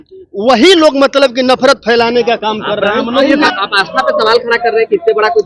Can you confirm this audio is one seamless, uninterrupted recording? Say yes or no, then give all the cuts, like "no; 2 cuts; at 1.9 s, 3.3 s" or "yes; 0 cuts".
no; 1 cut; at 3.5 s